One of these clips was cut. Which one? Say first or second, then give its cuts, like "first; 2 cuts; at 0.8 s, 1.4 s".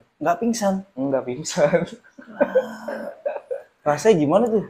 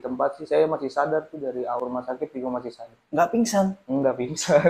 second; 1 cut; at 1.8 s